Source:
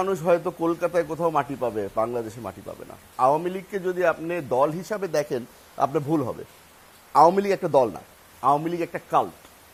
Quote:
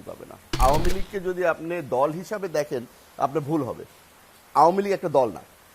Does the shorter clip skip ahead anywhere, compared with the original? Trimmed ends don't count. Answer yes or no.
no